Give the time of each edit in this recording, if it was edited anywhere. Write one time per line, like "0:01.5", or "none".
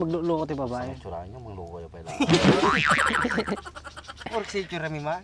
none